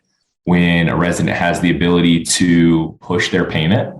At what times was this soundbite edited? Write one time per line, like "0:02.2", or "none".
0:03.0